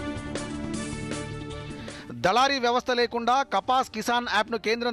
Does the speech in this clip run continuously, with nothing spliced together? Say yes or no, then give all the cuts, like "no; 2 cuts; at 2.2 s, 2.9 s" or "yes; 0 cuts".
no; 1 cut; at 1.9 s